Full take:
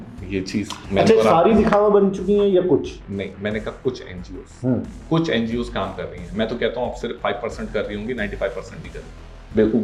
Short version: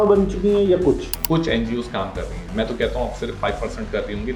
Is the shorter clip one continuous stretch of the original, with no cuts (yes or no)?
no